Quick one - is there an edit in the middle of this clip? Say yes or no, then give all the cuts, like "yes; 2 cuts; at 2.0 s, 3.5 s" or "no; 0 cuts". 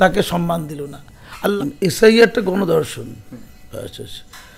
yes; 1 cut; at 1.5 s